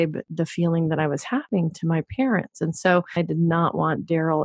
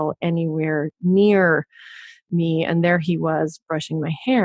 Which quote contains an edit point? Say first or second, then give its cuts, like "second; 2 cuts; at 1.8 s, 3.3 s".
first; 1 cut; at 3.1 s